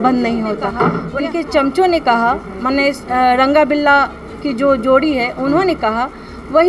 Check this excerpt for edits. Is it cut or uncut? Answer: cut